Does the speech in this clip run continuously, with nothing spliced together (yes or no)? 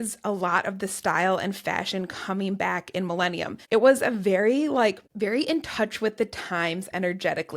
no